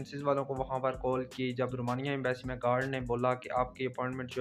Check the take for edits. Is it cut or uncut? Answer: uncut